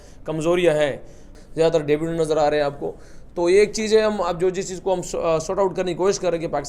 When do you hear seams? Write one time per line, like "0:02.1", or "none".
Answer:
0:01.3